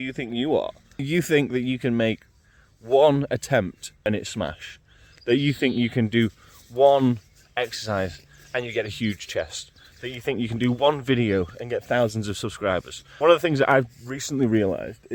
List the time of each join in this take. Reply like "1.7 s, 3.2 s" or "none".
1.1 s, 4.0 s, 13.0 s

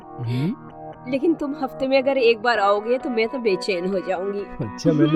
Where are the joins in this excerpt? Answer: none

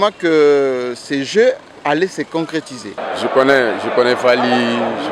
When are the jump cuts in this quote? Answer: 3.0 s

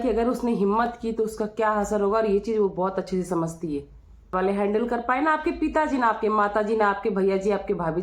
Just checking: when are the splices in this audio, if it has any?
4.3 s

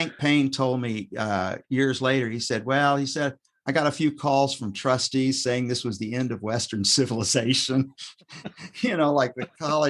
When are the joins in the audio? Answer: none

